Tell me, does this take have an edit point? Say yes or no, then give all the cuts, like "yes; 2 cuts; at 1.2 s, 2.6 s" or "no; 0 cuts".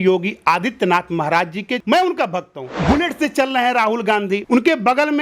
yes; 2 cuts; at 1.8 s, 2.7 s